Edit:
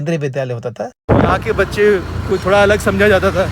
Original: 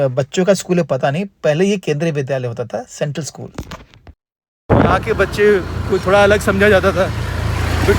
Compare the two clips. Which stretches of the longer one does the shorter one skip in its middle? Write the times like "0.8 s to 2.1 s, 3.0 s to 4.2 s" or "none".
2.9 s to 4.6 s